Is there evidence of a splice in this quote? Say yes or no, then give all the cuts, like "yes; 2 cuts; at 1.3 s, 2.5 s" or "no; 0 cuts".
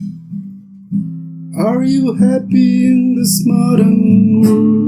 no; 0 cuts